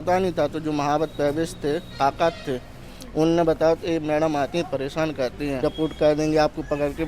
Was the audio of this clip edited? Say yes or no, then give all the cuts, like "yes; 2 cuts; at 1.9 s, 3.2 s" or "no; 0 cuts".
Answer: yes; 1 cut; at 5.6 s